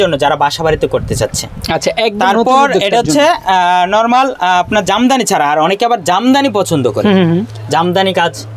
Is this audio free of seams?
yes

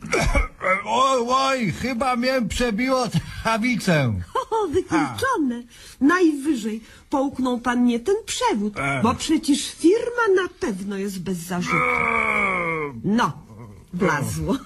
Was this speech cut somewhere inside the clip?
no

